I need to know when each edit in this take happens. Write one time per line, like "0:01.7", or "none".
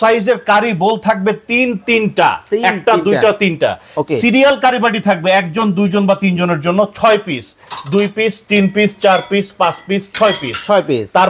none